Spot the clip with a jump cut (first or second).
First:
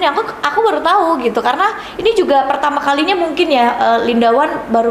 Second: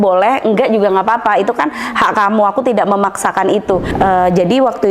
second